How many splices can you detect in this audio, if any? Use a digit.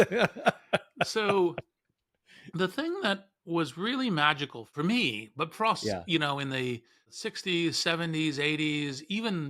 2